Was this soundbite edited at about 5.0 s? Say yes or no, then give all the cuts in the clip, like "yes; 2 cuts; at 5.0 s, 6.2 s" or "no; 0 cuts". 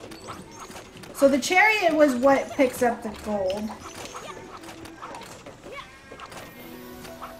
no; 1 cut; at 1.1 s